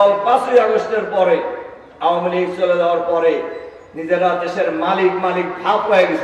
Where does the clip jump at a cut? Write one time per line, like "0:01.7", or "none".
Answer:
none